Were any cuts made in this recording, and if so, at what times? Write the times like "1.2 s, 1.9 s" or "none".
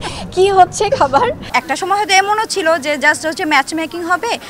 1.5 s